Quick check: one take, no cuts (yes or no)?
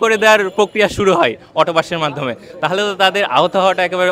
yes